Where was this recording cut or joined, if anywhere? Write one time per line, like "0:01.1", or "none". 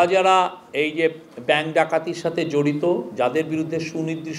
none